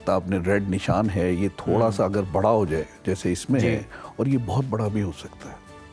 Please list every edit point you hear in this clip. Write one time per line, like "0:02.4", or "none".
none